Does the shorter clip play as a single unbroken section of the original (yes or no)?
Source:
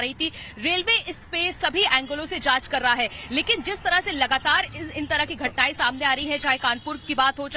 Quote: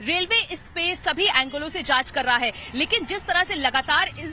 yes